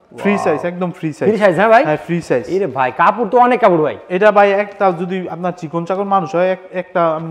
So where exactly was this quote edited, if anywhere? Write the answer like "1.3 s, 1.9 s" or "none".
none

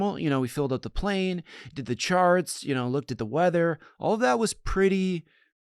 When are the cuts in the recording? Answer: none

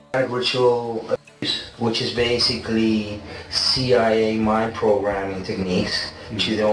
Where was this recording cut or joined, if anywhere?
none

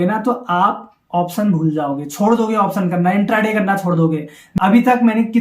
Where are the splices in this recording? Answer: 4.4 s

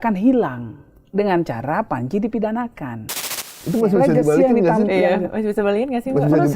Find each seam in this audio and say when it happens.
3.6 s

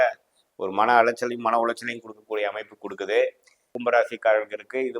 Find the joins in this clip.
3.7 s

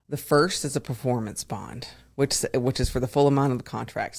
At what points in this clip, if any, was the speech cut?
none

